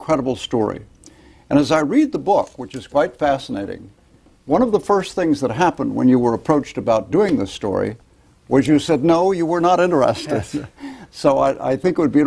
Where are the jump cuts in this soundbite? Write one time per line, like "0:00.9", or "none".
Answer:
none